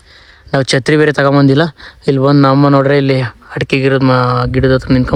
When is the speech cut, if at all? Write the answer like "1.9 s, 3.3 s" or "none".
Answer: none